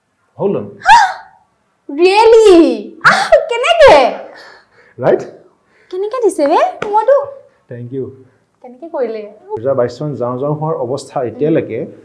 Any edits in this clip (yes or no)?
yes